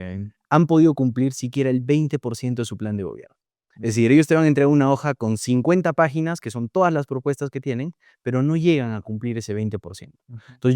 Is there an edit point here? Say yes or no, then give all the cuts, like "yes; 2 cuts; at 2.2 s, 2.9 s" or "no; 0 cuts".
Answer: no; 0 cuts